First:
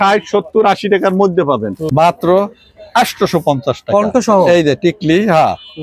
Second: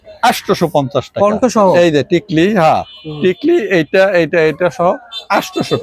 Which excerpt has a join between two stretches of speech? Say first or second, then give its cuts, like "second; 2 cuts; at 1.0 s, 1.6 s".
first; 1 cut; at 1.8 s